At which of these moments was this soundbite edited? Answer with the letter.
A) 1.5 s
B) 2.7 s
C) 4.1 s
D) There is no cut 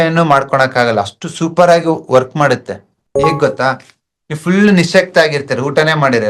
D